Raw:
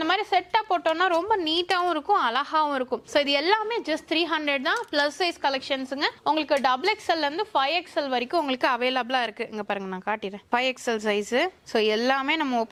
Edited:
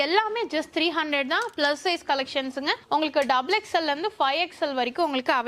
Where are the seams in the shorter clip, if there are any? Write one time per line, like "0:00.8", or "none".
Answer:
none